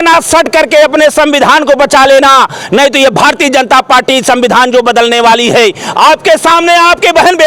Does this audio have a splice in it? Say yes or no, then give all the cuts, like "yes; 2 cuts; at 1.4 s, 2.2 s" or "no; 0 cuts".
no; 0 cuts